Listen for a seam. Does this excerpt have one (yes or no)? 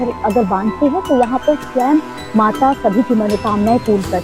no